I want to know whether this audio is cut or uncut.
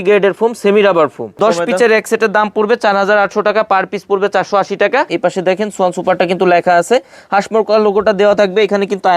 cut